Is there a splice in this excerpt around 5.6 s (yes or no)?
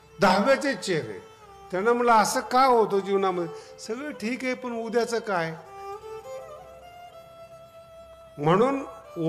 yes